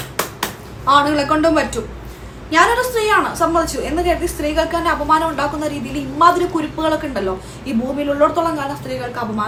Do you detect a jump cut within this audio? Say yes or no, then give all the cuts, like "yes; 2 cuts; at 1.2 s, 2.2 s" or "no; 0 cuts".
no; 0 cuts